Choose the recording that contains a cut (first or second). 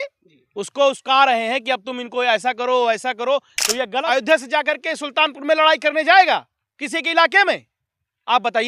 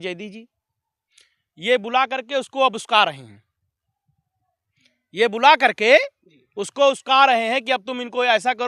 first